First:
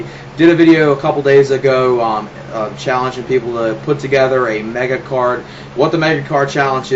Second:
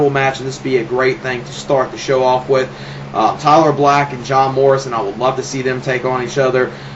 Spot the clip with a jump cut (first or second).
second